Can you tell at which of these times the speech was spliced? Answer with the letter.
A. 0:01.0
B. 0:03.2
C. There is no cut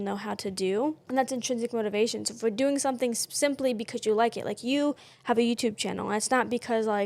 A